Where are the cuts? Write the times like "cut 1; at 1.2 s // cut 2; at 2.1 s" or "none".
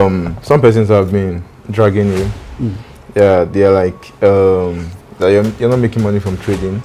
none